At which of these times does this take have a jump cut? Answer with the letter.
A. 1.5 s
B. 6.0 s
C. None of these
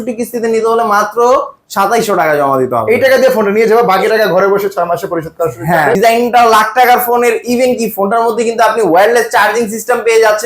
B